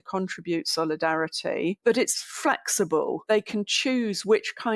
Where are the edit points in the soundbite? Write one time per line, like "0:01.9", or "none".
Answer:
0:01.8
0:03.2